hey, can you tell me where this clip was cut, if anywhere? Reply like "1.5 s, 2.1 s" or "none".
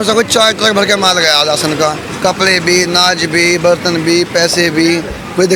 none